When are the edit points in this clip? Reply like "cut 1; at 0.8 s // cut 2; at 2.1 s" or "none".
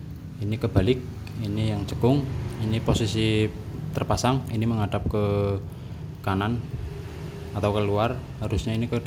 none